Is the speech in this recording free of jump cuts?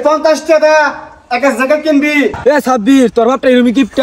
no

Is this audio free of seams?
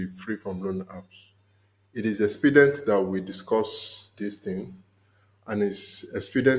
yes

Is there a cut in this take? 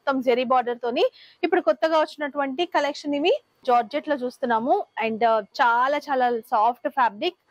yes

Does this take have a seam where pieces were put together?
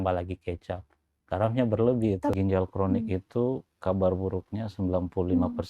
yes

